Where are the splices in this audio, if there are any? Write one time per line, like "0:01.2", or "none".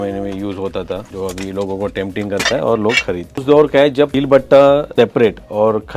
0:01.1
0:03.4
0:04.1
0:04.9